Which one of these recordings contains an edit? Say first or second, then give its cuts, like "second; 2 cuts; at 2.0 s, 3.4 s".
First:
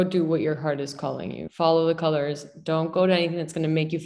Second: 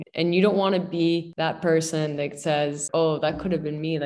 second; 2 cuts; at 1.3 s, 2.9 s